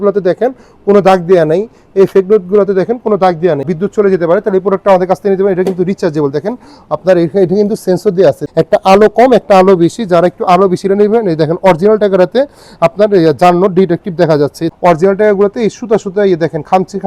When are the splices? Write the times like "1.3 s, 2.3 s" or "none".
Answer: 3.6 s, 8.4 s, 14.6 s